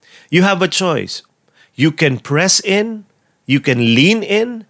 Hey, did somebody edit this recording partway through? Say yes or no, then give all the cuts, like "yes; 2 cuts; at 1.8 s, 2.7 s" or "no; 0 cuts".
no; 0 cuts